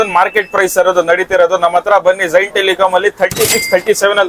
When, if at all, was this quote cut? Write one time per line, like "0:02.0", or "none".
none